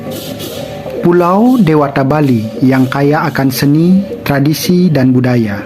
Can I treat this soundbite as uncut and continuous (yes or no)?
no